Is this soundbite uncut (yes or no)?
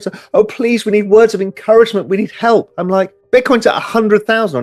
no